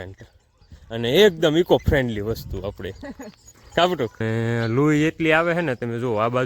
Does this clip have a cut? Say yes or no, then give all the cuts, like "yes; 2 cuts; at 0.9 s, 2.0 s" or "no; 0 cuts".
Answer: yes; 1 cut; at 4.2 s